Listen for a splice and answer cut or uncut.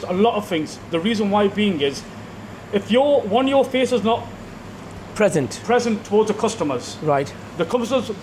uncut